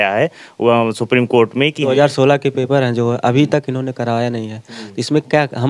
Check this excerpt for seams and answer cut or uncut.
cut